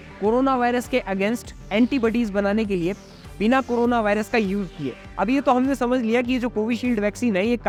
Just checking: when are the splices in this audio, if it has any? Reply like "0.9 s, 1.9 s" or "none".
none